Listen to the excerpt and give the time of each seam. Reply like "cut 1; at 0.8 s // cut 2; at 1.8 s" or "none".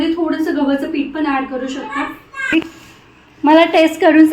cut 1; at 2.5 s